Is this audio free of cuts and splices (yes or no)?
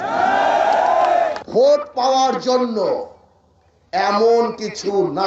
no